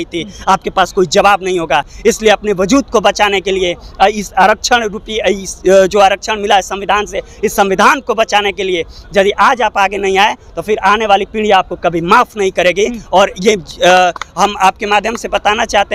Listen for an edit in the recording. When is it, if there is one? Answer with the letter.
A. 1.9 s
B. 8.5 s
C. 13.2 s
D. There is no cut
D